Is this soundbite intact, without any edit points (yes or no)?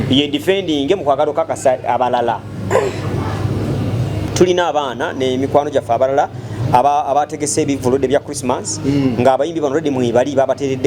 no